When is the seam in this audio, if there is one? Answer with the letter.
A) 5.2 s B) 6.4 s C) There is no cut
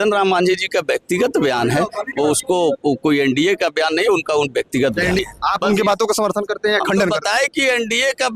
A